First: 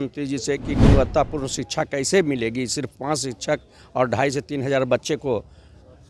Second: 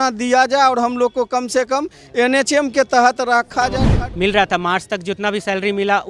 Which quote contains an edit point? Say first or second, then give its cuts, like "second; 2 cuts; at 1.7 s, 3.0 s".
second; 1 cut; at 3.9 s